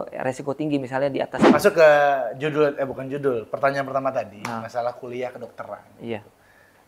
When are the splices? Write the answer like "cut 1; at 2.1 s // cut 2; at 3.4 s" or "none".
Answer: cut 1; at 1.4 s